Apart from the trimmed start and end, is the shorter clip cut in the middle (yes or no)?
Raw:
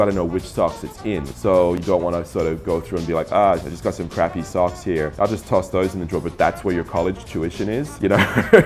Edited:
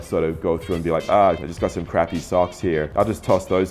no